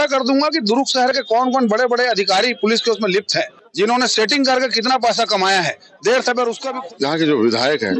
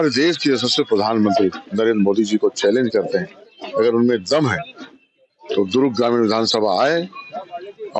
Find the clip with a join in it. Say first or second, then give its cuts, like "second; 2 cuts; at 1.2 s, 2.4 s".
first; 2 cuts; at 3.6 s, 6.6 s